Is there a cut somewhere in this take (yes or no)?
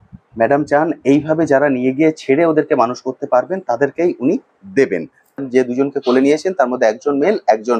yes